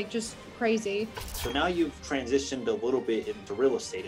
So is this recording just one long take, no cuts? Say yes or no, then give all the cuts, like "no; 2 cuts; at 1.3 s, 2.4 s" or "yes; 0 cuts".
no; 1 cut; at 1.3 s